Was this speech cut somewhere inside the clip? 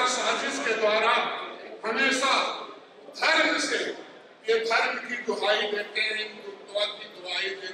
no; 0 cuts

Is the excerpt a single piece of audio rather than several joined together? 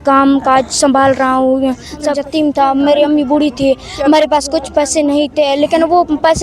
no; 1 cut; at 2.1 s

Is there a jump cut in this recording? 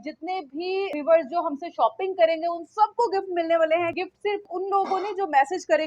yes; 2 cuts; at 0.9 s, 4.4 s

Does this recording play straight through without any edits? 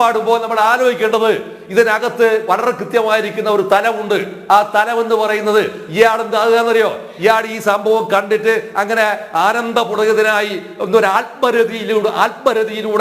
yes; 0 cuts

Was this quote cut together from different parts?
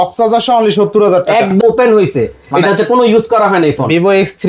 yes; 1 cut; at 1.5 s

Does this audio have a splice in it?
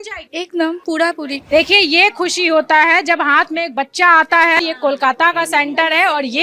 yes; 2 cuts; at 1.3 s, 4.6 s

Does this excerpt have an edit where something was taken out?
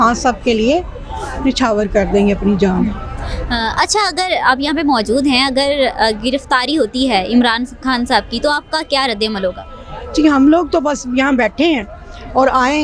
no; 0 cuts

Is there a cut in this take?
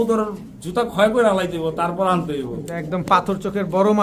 no; 0 cuts

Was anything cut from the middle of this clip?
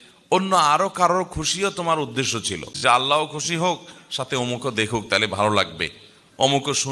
yes; 1 cut; at 2.6 s

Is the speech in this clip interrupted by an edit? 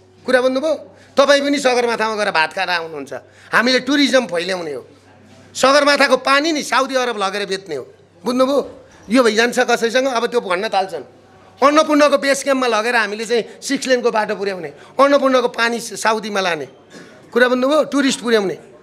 no; 0 cuts

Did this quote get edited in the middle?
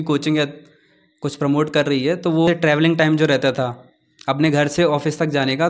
yes; 1 cut; at 2.5 s

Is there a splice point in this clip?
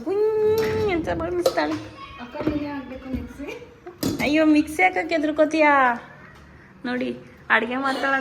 no; 0 cuts

